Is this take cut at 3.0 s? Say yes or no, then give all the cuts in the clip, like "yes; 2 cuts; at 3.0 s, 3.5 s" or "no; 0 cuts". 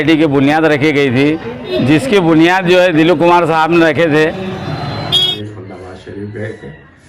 no; 2 cuts; at 1.7 s, 5.3 s